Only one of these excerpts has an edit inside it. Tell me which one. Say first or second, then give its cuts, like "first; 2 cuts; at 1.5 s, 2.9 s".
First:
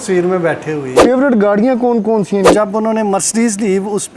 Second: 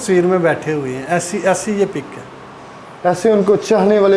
first; 2 cuts; at 1.0 s, 2.5 s